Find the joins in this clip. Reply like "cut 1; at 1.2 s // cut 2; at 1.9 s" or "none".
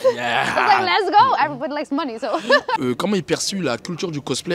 cut 1; at 2.8 s